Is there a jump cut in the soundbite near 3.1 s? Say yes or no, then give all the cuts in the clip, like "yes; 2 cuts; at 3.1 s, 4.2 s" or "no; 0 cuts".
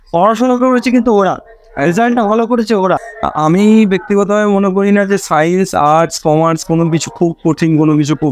yes; 1 cut; at 3.1 s